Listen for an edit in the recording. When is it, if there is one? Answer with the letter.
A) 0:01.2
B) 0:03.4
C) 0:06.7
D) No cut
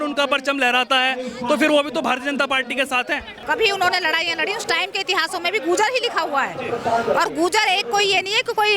B